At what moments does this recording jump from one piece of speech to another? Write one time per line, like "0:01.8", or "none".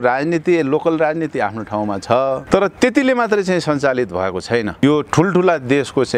0:02.4
0:04.8